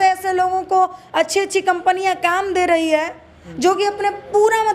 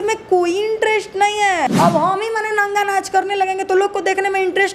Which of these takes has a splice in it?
second; 1 cut; at 1.7 s

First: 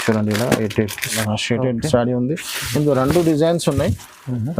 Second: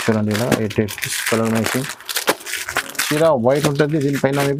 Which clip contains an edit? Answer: first; 1 cut; at 1.2 s

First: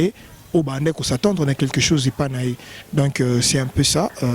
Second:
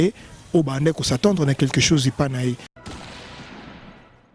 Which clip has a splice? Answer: second; 1 cut; at 2.7 s

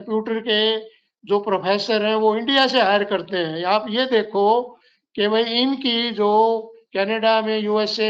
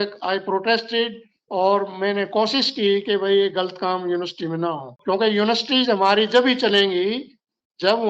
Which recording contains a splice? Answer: second; 1 cut; at 4.9 s

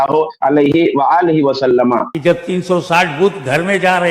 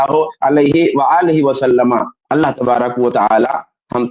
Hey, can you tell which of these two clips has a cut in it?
first; 1 cut; at 2.1 s

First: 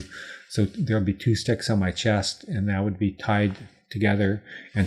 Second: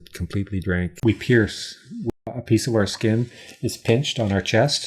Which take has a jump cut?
second; 2 cuts; at 1.0 s, 2.3 s

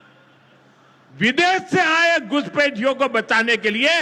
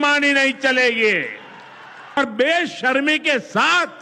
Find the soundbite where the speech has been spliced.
second; 1 cut; at 2.2 s

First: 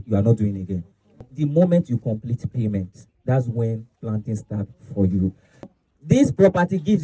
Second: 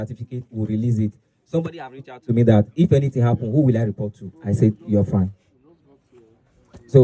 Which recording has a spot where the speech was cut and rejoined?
first; 2 cuts; at 1.3 s, 5.7 s

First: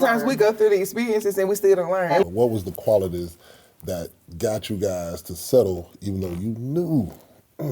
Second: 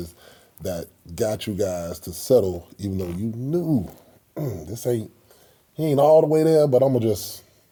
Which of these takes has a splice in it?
first; 1 cut; at 2.2 s

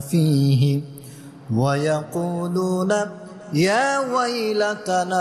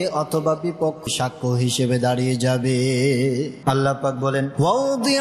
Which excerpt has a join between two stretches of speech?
second; 1 cut; at 3.5 s

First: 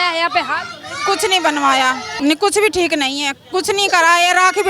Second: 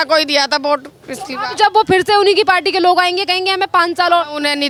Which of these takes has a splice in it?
first; 1 cut; at 2.1 s

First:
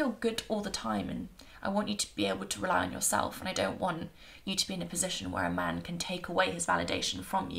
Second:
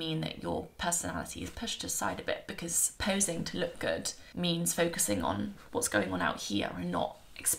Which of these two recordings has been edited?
second; 1 cut; at 5.6 s

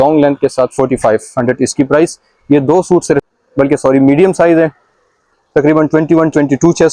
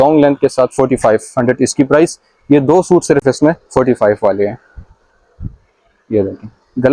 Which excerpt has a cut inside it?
first; 1 cut; at 3.2 s

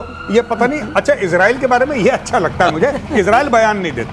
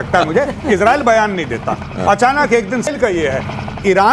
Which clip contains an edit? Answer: second; 1 cut; at 2.9 s

